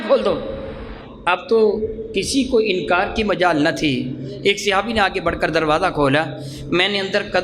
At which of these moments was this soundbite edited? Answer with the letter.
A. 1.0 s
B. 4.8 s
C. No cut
C